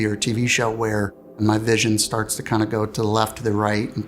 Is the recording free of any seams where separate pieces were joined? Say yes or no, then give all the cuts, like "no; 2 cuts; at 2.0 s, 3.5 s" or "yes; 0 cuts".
no; 1 cut; at 1.3 s